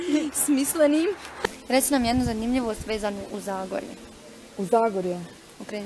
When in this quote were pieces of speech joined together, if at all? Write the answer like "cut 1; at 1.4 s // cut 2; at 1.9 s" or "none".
cut 1; at 1.4 s